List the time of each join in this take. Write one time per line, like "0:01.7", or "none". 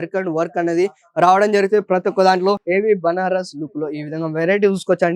0:02.6